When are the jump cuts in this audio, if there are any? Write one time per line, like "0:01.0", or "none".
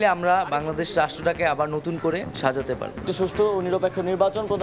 0:03.0